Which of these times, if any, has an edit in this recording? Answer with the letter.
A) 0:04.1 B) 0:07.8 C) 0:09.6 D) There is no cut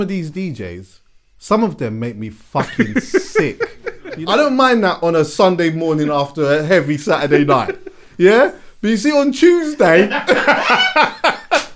A